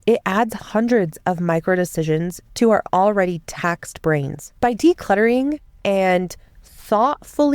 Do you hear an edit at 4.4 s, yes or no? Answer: yes